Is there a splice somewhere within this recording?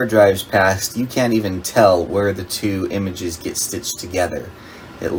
no; 0 cuts

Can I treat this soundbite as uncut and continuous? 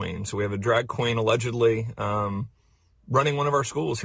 no; 1 cut; at 2.6 s

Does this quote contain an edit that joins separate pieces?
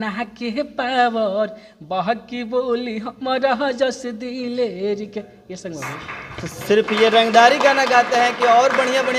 no; 0 cuts

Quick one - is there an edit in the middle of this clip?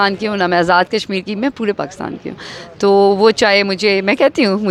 no; 0 cuts

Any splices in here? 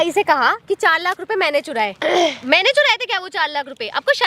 no; 0 cuts

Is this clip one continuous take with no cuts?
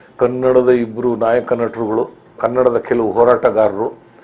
no; 1 cut; at 2.4 s

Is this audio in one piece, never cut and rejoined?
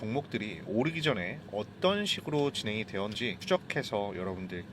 no; 1 cut; at 3.3 s

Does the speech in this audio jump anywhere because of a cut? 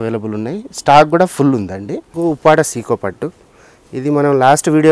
yes; 1 cut; at 2.1 s

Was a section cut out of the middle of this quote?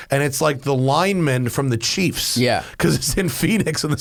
no; 0 cuts

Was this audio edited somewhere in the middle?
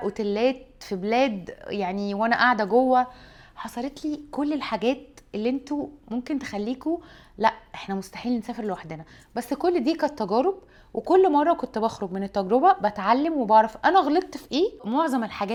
no; 0 cuts

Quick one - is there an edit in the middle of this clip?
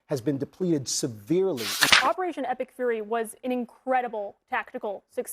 yes; 1 cut; at 1.8 s

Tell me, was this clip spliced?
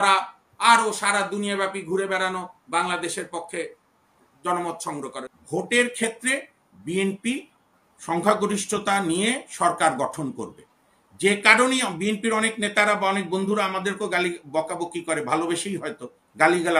yes; 1 cut; at 5.2 s

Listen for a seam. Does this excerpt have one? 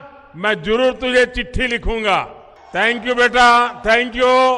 yes; 1 cut; at 2.4 s

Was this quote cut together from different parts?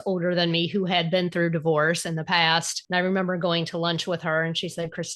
yes; 1 cut; at 2.8 s

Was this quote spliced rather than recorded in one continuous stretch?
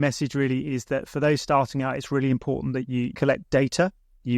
yes; 1 cut; at 3.1 s

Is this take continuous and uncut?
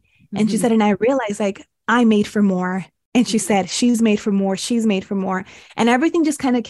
yes; 0 cuts

